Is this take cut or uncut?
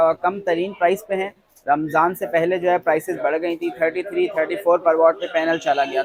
uncut